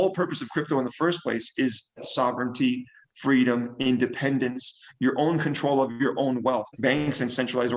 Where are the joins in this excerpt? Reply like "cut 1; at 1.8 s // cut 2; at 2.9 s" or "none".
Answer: cut 1; at 2.1 s // cut 2; at 6.7 s